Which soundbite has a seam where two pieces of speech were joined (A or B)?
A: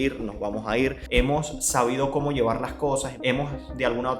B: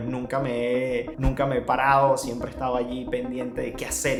A